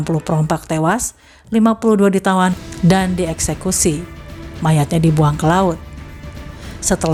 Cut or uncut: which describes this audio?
uncut